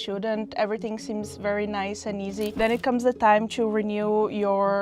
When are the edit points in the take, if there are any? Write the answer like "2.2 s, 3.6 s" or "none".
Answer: 2.5 s